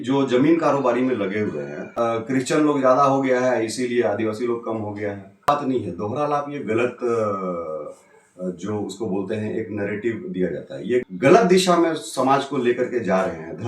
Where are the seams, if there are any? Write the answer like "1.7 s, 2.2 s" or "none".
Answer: 1.8 s, 5.5 s, 11.0 s